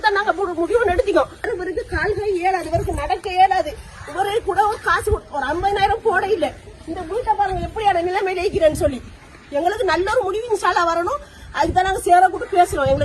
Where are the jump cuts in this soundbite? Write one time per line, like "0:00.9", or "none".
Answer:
0:01.5